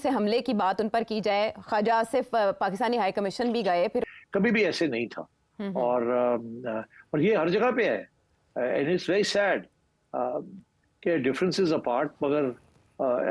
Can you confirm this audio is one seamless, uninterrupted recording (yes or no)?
no